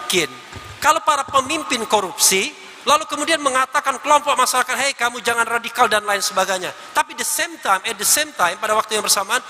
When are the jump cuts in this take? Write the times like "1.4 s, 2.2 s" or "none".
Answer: none